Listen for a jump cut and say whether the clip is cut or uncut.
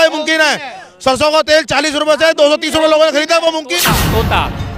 cut